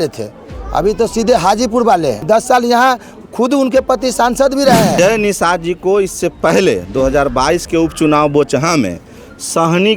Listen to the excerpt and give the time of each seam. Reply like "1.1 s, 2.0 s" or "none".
2.2 s, 5.0 s